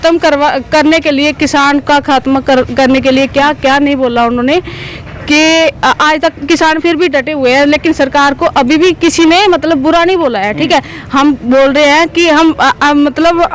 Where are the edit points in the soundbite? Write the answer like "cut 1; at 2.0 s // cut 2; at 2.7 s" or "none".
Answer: none